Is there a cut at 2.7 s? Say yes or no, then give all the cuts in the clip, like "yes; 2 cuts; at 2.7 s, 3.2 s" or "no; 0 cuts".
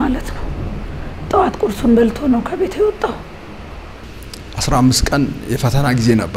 no; 1 cut; at 4.1 s